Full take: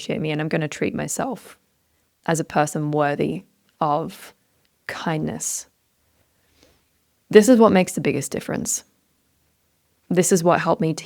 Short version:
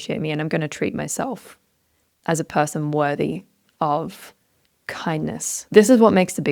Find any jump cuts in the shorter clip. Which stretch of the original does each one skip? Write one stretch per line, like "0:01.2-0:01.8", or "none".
0:05.5-0:07.1